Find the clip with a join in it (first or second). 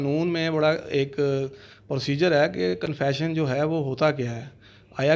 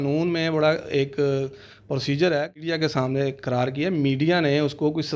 second